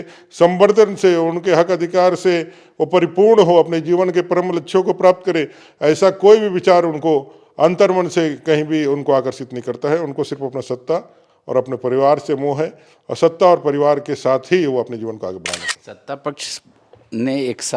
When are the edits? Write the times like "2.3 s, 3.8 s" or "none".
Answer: 15.5 s